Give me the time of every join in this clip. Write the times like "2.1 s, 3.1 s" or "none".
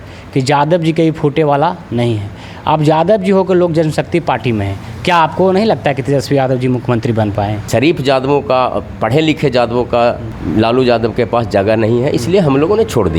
7.6 s, 10.3 s